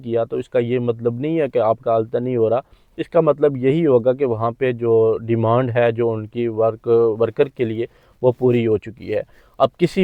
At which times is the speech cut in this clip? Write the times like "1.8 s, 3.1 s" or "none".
none

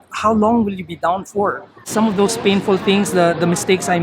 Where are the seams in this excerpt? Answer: 1.7 s

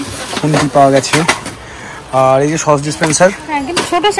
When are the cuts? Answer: none

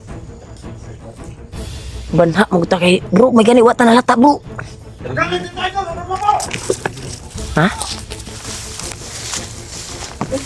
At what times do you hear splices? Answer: 1.6 s

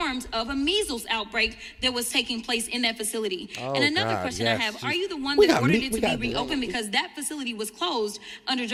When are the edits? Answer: none

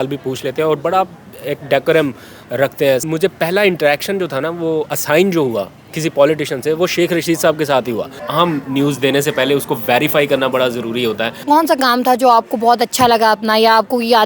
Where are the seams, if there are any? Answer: 3.0 s, 8.2 s, 11.4 s

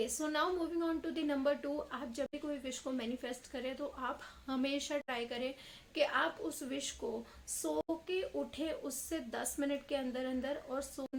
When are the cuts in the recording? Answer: none

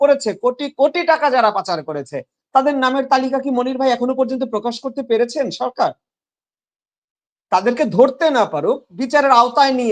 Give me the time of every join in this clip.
none

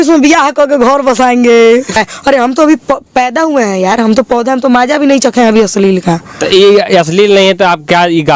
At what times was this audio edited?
2.0 s

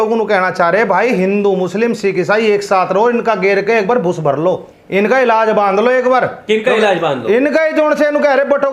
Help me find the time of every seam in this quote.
4.7 s, 6.4 s

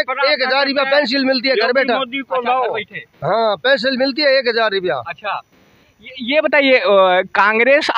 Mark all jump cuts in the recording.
none

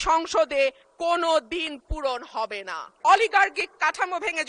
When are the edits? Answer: 2.9 s

